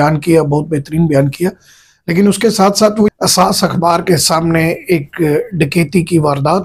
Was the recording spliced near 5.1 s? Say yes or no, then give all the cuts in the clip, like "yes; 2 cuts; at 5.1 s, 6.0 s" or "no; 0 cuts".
no; 1 cut; at 3.1 s